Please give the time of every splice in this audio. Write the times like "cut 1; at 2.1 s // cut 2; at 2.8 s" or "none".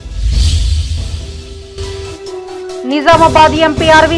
cut 1; at 1.1 s